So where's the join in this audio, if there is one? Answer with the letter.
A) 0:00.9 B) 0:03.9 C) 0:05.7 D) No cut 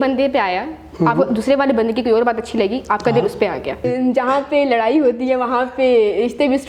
B